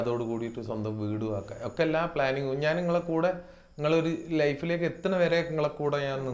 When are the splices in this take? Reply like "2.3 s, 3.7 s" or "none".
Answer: none